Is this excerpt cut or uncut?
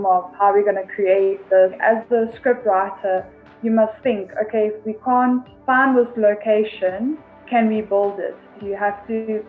cut